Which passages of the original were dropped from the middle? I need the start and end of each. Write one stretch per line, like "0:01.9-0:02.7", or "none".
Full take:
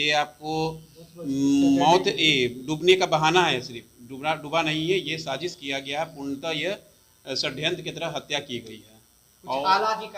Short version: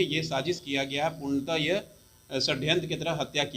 none